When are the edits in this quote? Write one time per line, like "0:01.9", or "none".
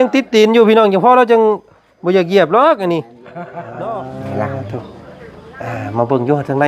0:03.7

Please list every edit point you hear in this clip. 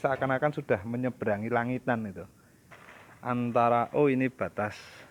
0:02.2

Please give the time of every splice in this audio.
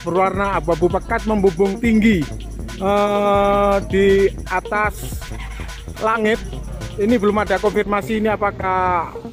none

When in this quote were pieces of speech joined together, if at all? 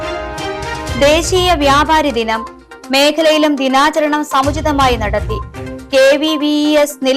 0:00.9

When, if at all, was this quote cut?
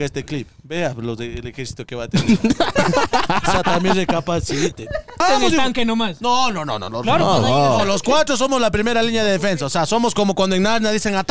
0:05.2

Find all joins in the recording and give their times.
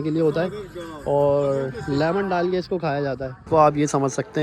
0:03.4

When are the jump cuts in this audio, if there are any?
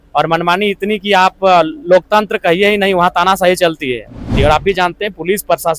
0:04.3

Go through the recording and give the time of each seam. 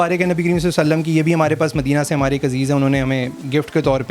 none

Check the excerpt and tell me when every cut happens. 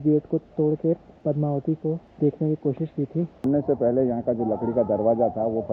0:01.1
0:02.1
0:03.4

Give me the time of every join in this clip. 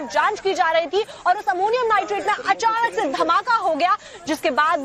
none

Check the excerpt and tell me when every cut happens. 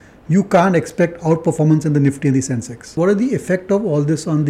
0:02.9

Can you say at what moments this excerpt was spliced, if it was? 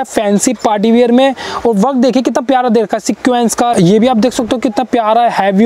0:03.7

